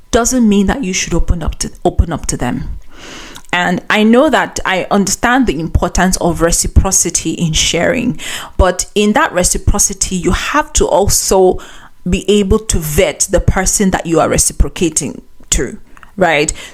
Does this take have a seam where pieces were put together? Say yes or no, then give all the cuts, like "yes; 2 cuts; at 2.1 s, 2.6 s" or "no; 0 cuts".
no; 0 cuts